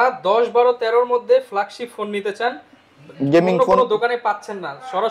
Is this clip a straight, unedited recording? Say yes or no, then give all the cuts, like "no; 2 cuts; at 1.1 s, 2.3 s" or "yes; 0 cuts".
yes; 0 cuts